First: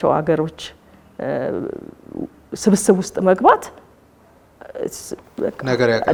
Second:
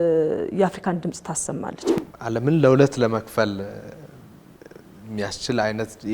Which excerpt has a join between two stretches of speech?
second; 1 cut; at 2.0 s

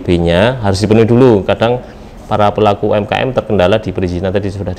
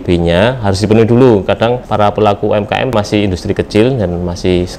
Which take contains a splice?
second; 2 cuts; at 1.8 s, 2.9 s

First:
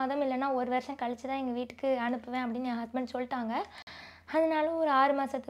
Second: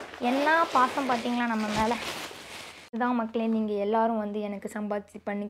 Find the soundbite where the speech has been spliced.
second; 1 cut; at 2.9 s

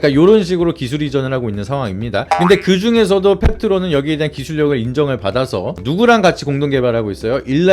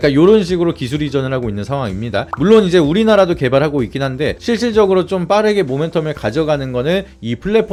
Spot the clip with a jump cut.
first; 1 cut; at 2.2 s

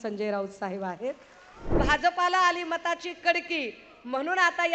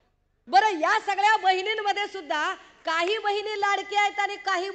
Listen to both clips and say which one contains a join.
first; 1 cut; at 1.8 s

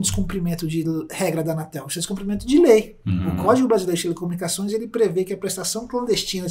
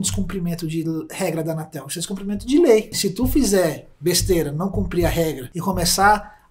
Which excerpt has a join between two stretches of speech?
second; 2 cuts; at 3.0 s, 5.5 s

